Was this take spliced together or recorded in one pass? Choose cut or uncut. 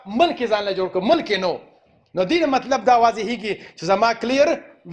uncut